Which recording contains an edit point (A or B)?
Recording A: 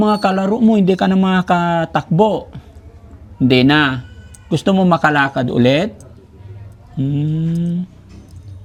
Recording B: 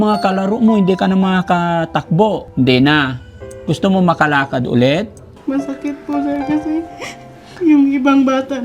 B